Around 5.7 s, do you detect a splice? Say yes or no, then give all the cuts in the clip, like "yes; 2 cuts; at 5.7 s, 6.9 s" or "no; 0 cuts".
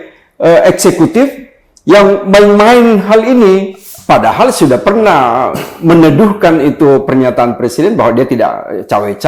no; 1 cut; at 3.9 s